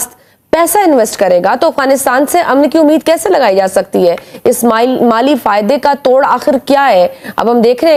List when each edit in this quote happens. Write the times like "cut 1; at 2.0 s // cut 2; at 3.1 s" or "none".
none